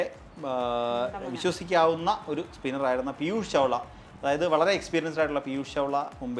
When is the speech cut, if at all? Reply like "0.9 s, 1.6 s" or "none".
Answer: none